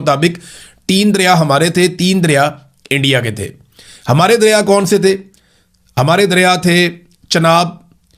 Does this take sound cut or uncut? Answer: uncut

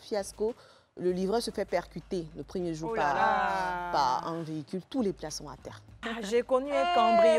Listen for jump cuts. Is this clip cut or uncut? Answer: cut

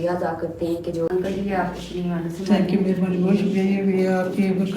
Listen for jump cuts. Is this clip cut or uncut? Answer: cut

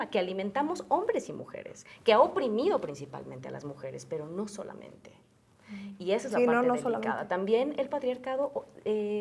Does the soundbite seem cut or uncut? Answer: uncut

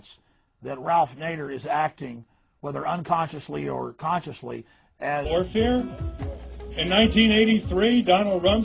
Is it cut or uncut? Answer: uncut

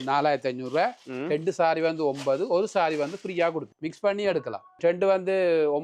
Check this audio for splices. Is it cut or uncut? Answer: cut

